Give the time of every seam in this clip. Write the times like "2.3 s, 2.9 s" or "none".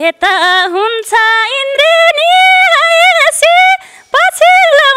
none